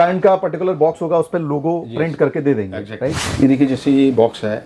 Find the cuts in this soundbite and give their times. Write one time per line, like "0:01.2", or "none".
0:03.2